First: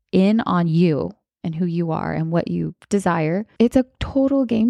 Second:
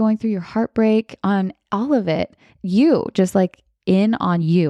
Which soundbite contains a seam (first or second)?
first